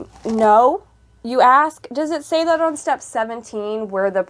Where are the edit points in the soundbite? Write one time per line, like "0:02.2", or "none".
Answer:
none

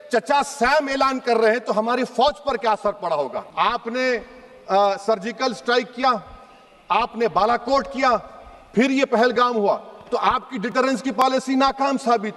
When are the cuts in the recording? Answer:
0:03.4

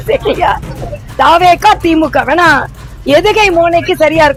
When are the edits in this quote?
none

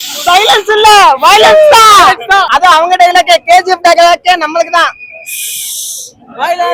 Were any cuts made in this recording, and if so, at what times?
none

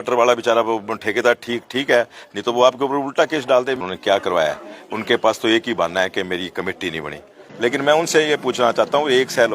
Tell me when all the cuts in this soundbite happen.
0:03.7
0:07.4

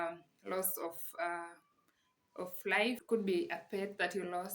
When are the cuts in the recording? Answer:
0:03.0

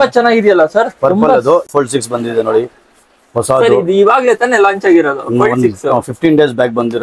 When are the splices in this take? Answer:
0:01.7

